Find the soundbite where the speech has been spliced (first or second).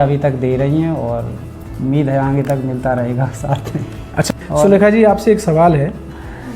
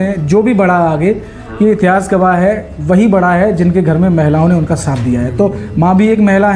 first